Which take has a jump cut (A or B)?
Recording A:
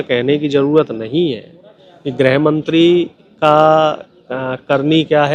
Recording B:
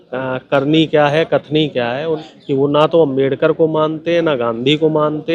B